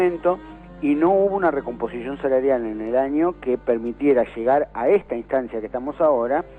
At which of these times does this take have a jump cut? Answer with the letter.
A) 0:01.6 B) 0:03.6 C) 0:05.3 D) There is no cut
D